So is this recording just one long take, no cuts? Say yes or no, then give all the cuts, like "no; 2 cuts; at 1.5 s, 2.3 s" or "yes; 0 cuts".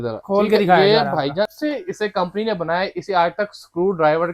no; 1 cut; at 1.5 s